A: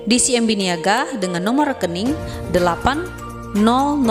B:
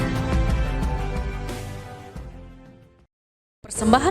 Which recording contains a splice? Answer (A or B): B